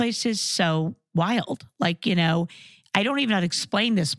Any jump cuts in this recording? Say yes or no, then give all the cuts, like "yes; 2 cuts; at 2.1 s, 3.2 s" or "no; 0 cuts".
no; 0 cuts